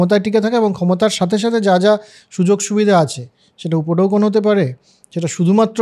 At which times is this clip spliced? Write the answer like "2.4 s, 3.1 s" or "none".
none